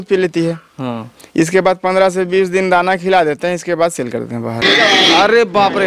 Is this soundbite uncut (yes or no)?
no